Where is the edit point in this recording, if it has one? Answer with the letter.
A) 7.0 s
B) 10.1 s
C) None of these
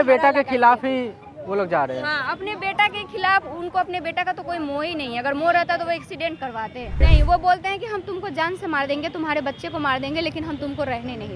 A